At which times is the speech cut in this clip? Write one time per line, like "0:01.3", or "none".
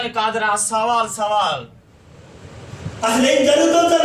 0:01.8